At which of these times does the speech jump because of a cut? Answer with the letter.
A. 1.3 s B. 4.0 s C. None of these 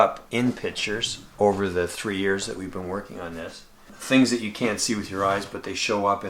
B